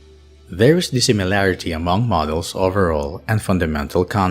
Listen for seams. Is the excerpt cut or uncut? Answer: cut